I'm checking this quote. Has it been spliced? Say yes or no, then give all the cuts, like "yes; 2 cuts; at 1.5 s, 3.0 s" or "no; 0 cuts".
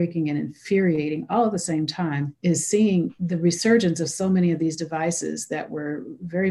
yes; 2 cuts; at 2.3 s, 3.2 s